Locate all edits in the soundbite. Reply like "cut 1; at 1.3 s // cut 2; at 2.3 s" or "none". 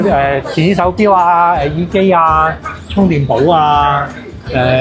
none

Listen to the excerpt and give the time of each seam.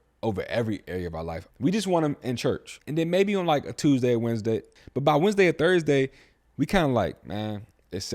cut 1; at 1.4 s // cut 2; at 2.7 s // cut 3; at 4.7 s

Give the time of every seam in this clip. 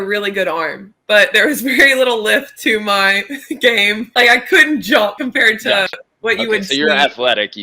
cut 1; at 4.1 s // cut 2; at 5.2 s

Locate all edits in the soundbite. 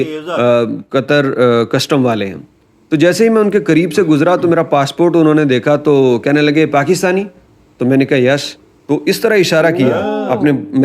none

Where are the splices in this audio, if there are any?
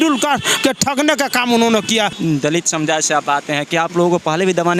cut 1; at 2.1 s

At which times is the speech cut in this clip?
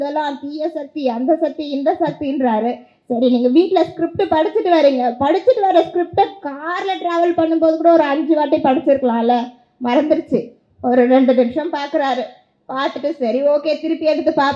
none

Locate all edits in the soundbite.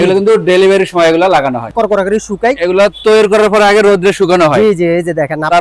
cut 1; at 1.7 s

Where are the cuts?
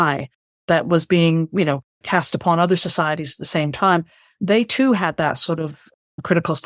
none

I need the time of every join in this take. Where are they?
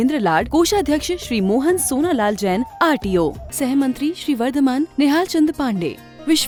none

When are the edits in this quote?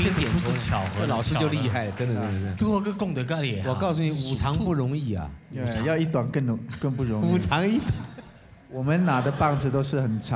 none

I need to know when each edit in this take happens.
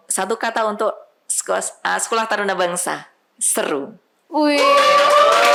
none

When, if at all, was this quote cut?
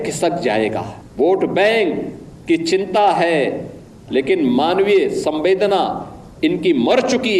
cut 1; at 1.0 s

